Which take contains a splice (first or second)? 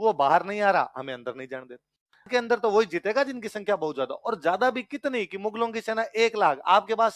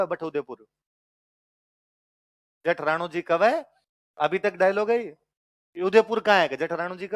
first